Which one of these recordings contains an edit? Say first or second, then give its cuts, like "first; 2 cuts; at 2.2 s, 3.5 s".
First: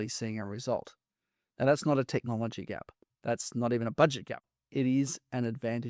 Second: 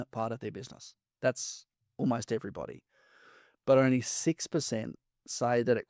first; 1 cut; at 4.4 s